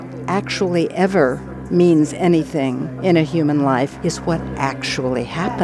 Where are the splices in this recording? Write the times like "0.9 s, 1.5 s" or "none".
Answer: 1.5 s, 2.9 s, 3.9 s